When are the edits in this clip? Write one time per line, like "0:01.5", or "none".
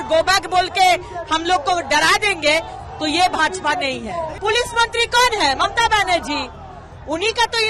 0:04.3

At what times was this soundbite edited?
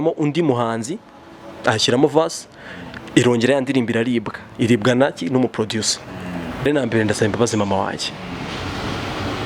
0:06.7

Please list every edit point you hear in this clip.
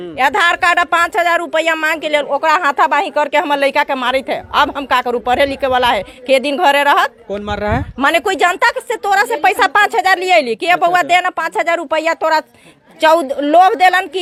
none

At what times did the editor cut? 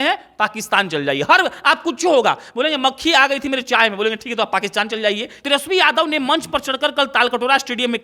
0:05.4

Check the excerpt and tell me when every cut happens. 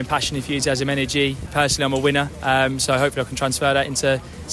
0:01.4

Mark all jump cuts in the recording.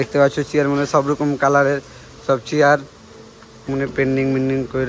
0:03.7

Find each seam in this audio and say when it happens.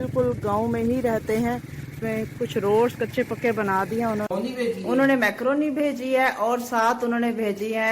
0:04.3

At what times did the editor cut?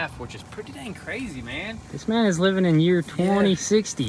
none

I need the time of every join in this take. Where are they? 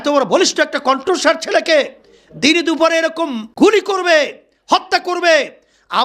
0:03.4

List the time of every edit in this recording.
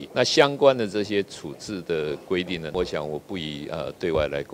0:02.7

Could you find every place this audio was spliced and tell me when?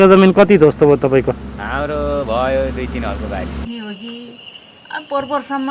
0:03.6

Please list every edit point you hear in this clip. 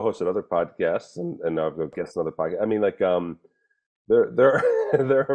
0:01.9

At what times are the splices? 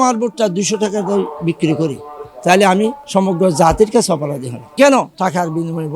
0:05.0

